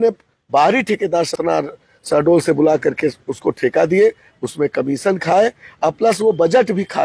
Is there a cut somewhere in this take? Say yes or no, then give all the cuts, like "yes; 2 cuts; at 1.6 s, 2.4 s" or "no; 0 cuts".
yes; 1 cut; at 1.3 s